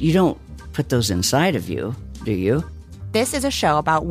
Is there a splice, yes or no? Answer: yes